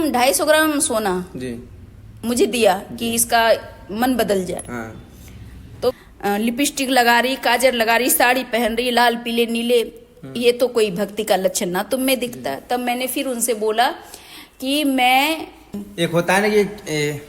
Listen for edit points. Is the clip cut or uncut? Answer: cut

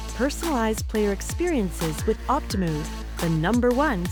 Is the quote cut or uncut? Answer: uncut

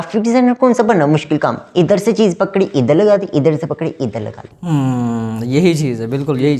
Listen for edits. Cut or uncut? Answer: uncut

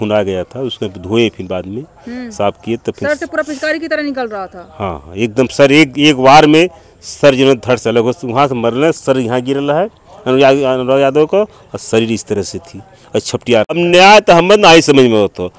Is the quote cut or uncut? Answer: cut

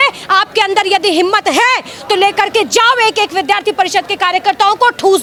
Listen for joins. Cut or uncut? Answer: uncut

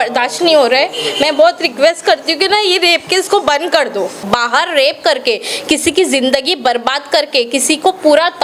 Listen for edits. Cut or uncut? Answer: cut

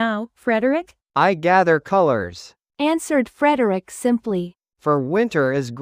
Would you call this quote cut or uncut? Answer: cut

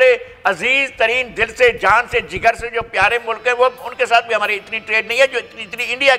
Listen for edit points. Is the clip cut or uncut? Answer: uncut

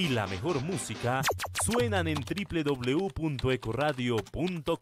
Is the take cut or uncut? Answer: uncut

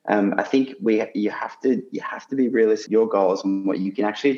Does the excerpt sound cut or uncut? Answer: cut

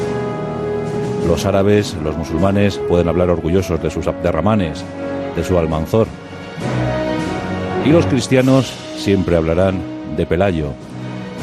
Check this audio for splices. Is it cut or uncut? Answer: cut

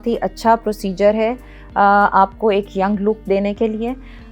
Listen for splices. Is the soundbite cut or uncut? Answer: uncut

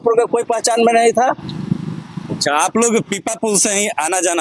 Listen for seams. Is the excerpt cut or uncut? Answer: uncut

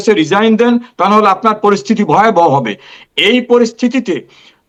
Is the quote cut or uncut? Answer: uncut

